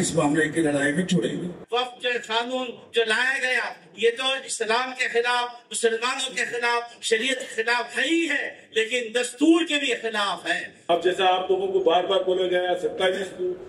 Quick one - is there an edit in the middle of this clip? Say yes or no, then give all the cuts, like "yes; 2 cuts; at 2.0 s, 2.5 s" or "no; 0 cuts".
yes; 2 cuts; at 1.6 s, 10.8 s